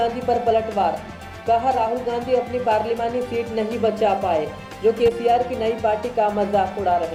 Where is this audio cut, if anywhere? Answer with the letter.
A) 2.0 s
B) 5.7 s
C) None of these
C